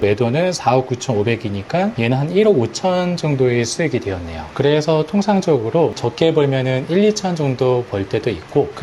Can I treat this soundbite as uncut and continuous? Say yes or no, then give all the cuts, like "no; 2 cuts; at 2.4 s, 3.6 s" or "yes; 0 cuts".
yes; 0 cuts